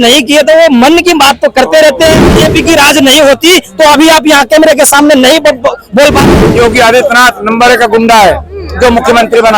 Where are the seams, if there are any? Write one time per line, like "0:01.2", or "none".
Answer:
0:02.3
0:06.2